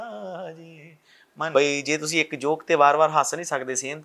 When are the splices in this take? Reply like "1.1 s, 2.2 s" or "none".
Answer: 1.5 s